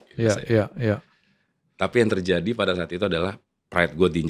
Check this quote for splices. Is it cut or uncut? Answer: uncut